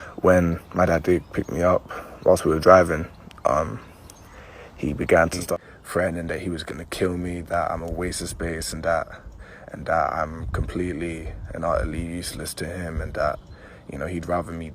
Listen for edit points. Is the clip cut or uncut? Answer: cut